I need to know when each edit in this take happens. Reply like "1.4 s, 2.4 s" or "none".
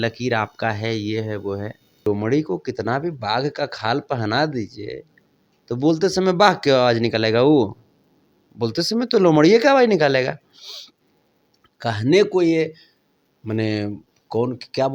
2.1 s